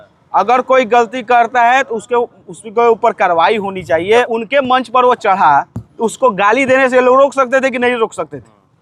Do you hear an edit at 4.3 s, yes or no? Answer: yes